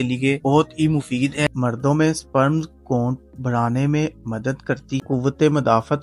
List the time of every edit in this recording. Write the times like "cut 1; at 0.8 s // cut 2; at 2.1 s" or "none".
cut 1; at 1.5 s // cut 2; at 4.9 s

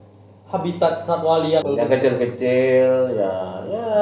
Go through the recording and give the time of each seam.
cut 1; at 1.7 s

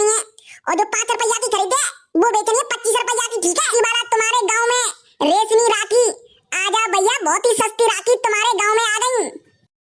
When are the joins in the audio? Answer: cut 1; at 3.6 s

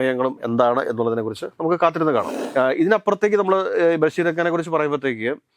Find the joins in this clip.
cut 1; at 2.4 s

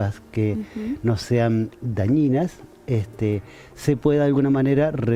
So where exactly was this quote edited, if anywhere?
none

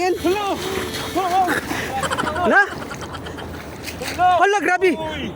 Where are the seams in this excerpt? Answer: none

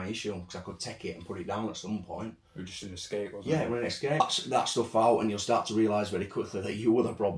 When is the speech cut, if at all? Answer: cut 1; at 4.2 s

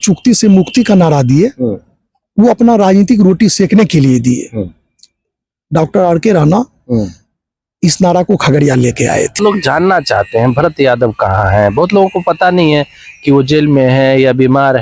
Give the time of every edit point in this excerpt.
cut 1; at 9.4 s

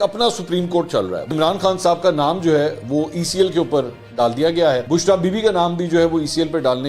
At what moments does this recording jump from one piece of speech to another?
none

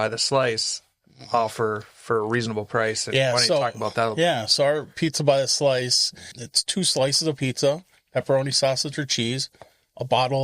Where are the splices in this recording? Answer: cut 1; at 6.4 s

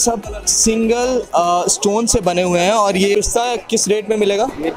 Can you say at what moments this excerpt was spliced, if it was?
cut 1; at 3.1 s

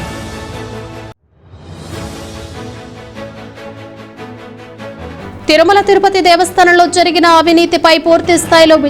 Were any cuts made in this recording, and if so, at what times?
cut 1; at 1.2 s

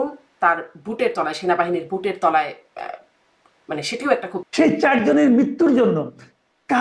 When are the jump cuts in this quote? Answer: cut 1; at 4.5 s

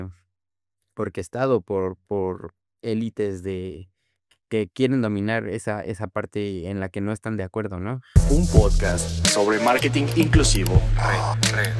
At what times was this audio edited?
cut 1; at 8.0 s

